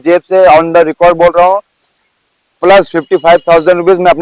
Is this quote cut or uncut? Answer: uncut